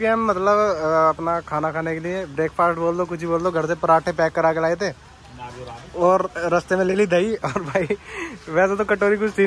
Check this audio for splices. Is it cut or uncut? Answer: uncut